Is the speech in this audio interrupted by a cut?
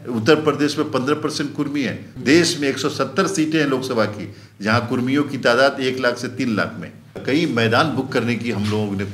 yes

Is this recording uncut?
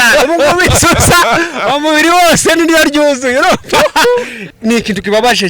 no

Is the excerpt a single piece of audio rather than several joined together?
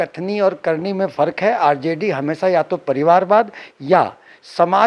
yes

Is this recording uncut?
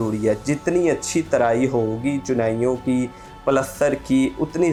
yes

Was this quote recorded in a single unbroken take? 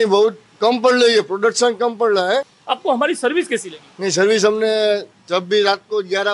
no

